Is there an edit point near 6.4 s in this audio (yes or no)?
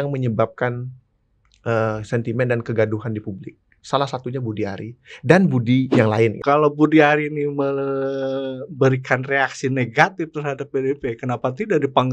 yes